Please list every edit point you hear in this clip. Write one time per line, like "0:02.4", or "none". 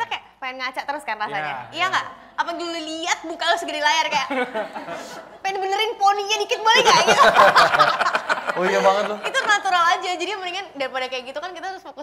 none